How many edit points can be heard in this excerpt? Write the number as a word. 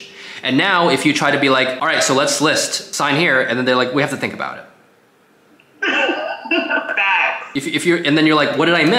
three